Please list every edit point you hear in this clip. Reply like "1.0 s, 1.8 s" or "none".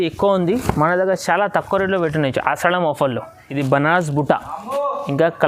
3.4 s